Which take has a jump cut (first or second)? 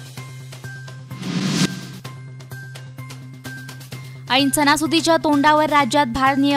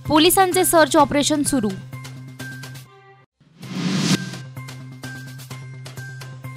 first